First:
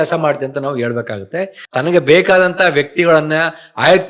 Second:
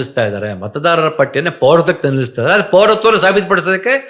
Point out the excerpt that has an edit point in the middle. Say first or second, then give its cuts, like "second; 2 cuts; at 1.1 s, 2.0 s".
first; 1 cut; at 1.6 s